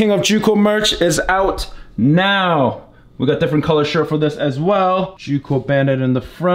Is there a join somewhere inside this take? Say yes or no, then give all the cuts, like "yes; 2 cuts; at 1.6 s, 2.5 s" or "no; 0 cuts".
yes; 1 cut; at 5.2 s